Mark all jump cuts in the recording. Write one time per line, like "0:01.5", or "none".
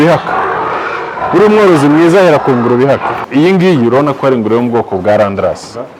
0:03.2